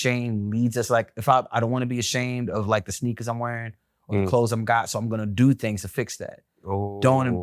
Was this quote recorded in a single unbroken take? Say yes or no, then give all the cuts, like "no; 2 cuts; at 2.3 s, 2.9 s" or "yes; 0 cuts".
yes; 0 cuts